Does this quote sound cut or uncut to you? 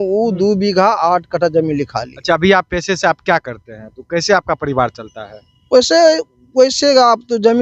cut